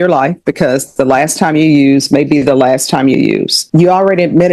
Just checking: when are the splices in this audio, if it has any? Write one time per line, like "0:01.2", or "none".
0:03.6